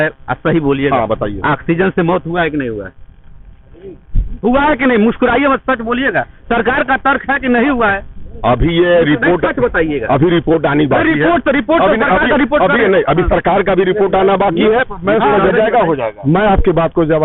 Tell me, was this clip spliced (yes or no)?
no